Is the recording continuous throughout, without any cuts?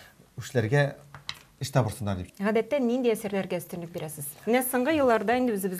no; 1 cut; at 2.3 s

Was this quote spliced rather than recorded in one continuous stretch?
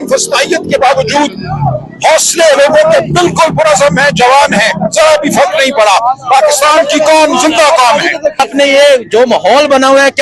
yes; 1 cut; at 8.4 s

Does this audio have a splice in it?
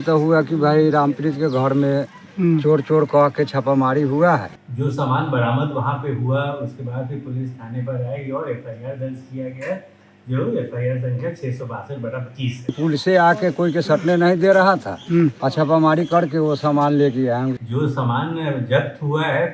yes; 4 cuts; at 4.5 s, 12.8 s, 15.4 s, 17.6 s

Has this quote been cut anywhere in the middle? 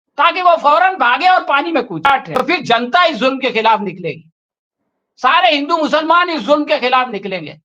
yes; 1 cut; at 2.2 s

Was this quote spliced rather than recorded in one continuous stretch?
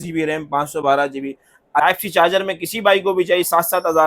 yes; 1 cut; at 1.8 s

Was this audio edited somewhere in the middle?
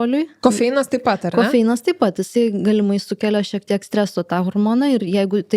no; 0 cuts

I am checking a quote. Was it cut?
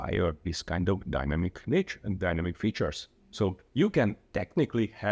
no; 0 cuts

